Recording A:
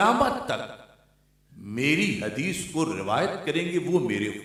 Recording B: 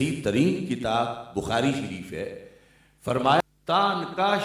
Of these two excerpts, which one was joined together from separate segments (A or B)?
B